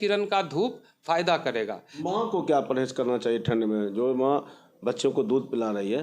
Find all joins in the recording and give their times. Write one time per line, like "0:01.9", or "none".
0:01.9